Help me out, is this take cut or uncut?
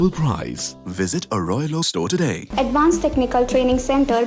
cut